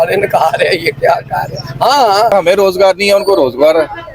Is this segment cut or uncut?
cut